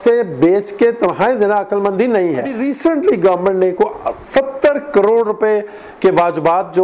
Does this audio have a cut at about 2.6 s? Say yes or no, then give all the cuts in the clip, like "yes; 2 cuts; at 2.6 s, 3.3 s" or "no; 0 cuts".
yes; 1 cut; at 2.6 s